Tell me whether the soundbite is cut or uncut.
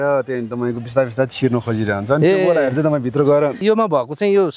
cut